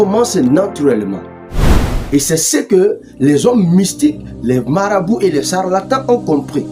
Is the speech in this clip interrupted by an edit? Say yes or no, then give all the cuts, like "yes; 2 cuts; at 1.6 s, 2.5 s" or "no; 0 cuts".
no; 0 cuts